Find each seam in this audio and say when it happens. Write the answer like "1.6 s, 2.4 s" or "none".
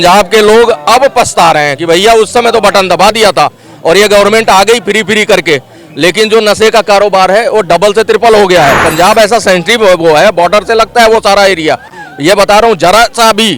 none

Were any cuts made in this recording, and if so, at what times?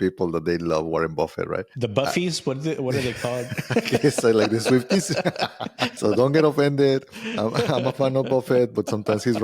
1.7 s, 5.9 s

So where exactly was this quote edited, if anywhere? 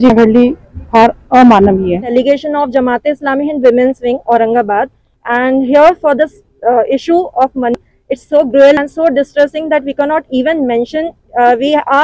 2.0 s

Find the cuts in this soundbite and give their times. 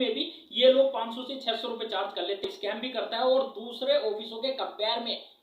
2.4 s

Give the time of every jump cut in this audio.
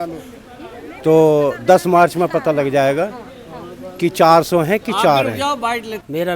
none

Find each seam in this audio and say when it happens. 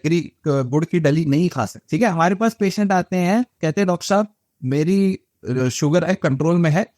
1.7 s

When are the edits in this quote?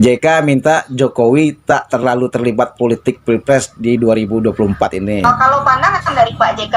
5.2 s

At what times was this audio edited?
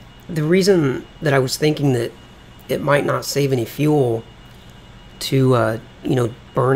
2.4 s

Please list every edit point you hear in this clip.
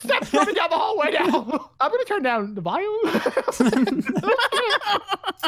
none

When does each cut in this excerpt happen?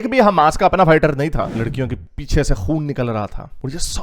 1.5 s

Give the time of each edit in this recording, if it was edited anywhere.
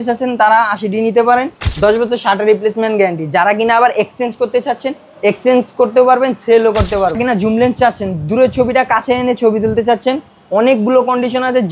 1.6 s, 7.2 s

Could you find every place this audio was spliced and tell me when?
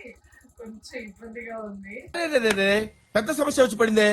2.1 s

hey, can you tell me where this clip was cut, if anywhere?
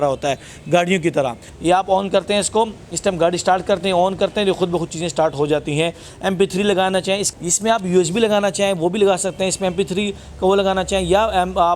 1.5 s

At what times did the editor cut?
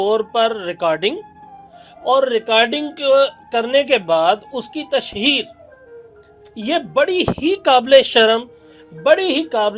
none

